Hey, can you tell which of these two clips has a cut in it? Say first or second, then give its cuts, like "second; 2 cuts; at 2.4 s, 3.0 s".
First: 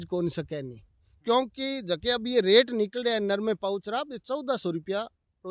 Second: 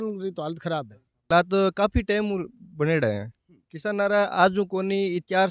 second; 1 cut; at 1.3 s